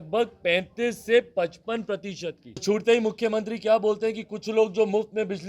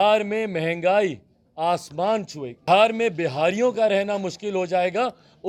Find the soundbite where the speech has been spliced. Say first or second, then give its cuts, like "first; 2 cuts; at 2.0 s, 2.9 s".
first; 1 cut; at 2.6 s